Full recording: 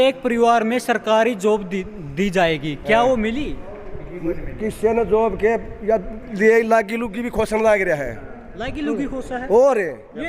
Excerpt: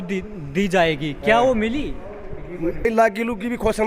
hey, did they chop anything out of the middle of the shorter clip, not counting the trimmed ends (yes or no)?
yes